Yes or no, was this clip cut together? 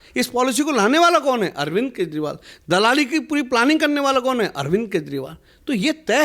no